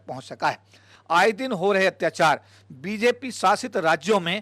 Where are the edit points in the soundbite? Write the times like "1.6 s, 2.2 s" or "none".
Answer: 0.9 s